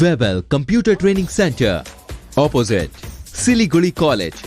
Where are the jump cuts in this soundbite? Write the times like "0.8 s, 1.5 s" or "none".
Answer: none